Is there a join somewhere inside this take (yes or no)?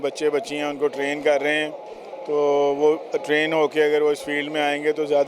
no